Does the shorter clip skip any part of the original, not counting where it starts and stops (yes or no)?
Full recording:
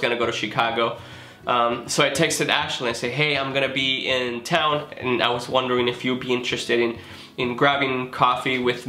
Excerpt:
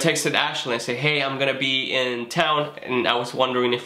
no